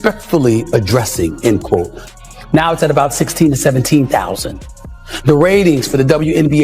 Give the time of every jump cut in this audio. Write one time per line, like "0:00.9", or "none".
0:02.1